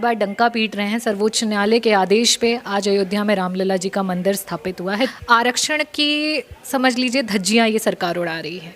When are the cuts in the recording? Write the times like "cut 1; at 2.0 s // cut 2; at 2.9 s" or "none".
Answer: cut 1; at 5.1 s